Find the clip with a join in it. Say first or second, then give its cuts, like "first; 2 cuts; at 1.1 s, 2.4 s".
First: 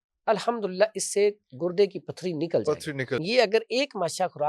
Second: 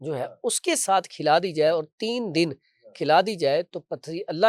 first; 1 cut; at 3.2 s